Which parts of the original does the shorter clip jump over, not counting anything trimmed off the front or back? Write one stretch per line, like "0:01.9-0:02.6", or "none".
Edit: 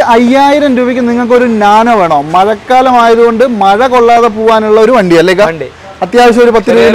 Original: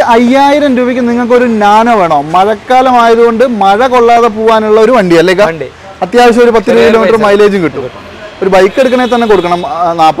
none